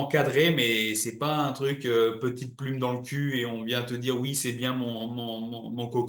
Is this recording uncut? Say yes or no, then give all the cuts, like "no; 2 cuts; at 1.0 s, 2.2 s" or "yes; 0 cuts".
yes; 0 cuts